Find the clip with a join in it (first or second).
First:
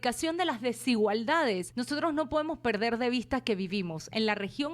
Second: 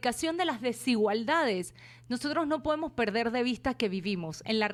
first